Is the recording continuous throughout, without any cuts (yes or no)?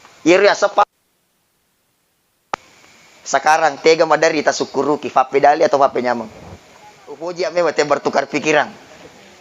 no